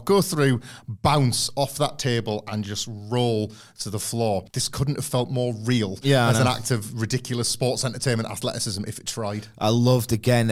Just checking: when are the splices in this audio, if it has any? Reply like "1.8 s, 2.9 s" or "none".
none

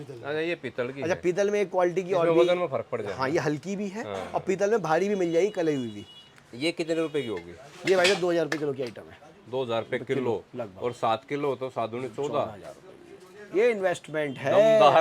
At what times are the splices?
none

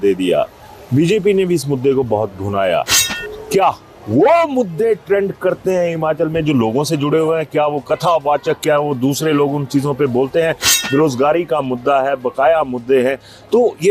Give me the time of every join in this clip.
none

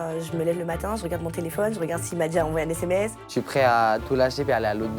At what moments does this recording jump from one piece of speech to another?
3.2 s

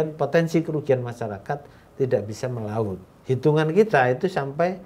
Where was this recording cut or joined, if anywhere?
3.1 s

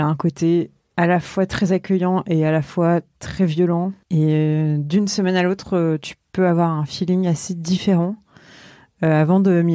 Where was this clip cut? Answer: 4.0 s

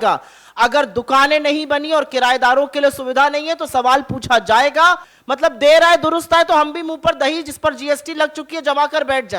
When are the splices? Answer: 5.1 s

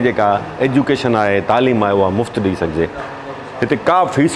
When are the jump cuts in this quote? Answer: none

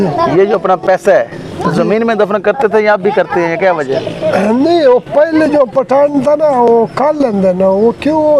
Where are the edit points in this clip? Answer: none

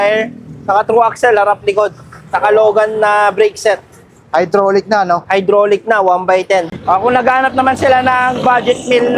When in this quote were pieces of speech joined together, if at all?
6.7 s

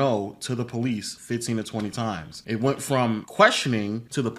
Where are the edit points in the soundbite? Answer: none

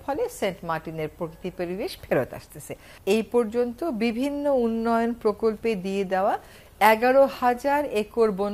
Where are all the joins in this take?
2.9 s

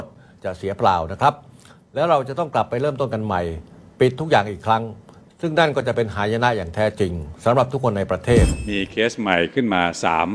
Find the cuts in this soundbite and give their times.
8.6 s

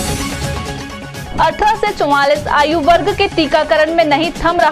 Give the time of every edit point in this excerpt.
none

